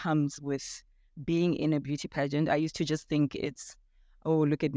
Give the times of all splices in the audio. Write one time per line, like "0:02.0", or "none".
none